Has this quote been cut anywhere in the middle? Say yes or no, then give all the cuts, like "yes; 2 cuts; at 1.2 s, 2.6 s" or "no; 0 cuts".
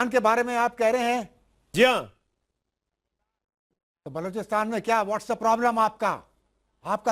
yes; 1 cut; at 3.1 s